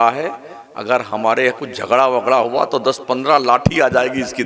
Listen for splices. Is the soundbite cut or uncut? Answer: uncut